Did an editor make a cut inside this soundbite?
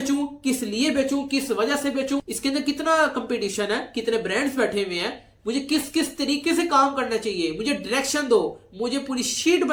no; 0 cuts

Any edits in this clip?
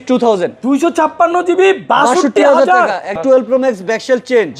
yes; 1 cut; at 3.2 s

